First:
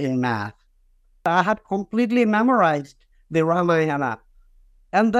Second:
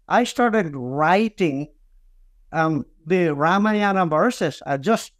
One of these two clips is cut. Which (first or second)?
first